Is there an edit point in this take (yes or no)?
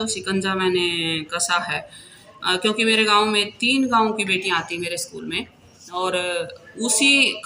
no